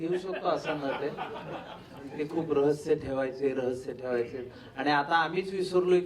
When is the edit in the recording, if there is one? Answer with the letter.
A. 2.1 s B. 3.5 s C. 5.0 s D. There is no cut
A